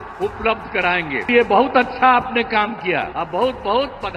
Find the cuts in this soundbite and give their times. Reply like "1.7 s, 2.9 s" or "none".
1.3 s, 3.2 s